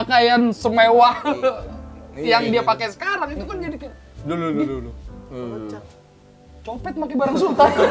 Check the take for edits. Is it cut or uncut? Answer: uncut